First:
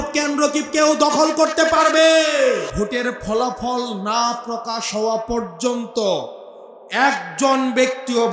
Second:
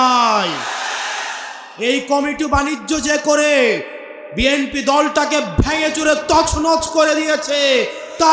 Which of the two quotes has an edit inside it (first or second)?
first